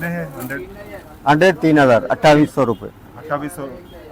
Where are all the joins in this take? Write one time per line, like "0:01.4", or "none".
none